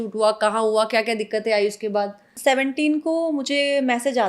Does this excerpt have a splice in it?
yes; 1 cut; at 2.2 s

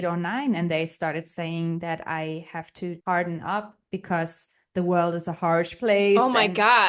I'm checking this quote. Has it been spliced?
no; 0 cuts

